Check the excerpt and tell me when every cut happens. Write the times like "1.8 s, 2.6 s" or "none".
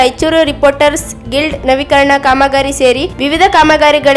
none